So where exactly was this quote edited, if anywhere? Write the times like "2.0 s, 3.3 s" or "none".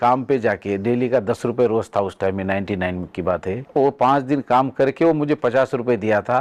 3.6 s